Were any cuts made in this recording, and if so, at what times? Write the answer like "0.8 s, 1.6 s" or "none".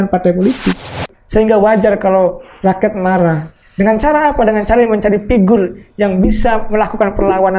1.1 s